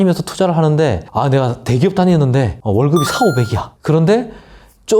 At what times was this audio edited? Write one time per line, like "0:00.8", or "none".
0:01.0
0:02.6
0:03.7